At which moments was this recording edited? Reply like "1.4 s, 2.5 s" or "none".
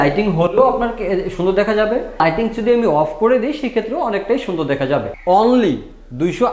5.1 s